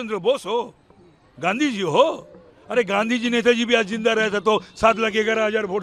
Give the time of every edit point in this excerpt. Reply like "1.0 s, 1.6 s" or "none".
none